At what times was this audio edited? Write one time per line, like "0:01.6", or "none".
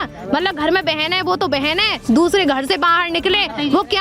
none

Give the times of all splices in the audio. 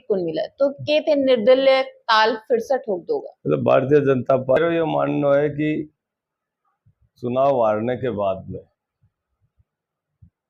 0:04.6

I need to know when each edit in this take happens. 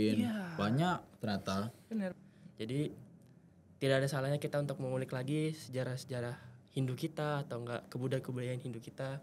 0:02.1

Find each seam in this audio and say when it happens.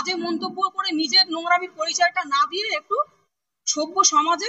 none

